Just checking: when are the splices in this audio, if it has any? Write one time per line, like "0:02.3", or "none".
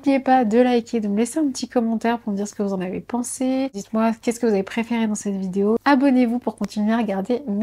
0:03.8
0:05.8